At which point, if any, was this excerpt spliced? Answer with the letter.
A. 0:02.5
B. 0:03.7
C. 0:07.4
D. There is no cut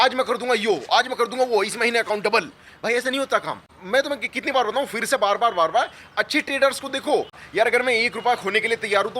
C